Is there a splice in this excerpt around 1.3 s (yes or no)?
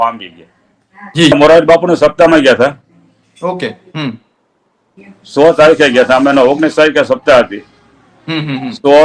yes